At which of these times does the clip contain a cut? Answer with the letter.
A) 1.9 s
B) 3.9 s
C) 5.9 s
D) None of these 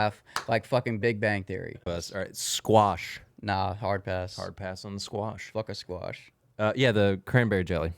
A